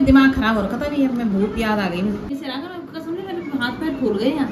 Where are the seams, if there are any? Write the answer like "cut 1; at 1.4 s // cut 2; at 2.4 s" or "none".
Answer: cut 1; at 2.4 s